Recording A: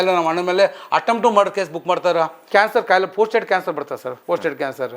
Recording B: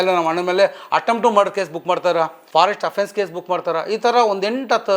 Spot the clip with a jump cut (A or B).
A